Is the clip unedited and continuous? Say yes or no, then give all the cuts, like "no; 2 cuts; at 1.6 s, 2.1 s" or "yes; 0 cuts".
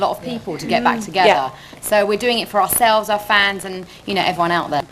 yes; 0 cuts